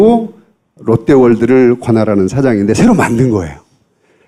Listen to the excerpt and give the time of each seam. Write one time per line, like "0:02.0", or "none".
none